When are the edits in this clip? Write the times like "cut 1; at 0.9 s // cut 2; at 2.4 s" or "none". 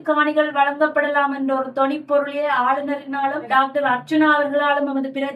cut 1; at 3.5 s